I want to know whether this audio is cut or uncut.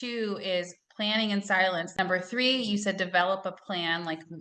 cut